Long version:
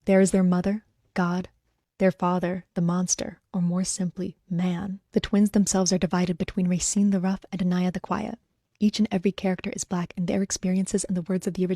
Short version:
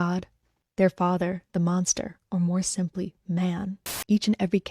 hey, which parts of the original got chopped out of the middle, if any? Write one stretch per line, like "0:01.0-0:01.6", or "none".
0:05.0-0:08.5